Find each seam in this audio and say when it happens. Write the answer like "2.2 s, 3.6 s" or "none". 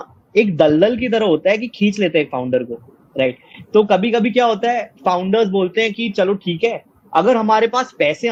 none